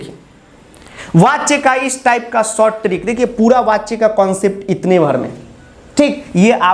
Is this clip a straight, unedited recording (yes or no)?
yes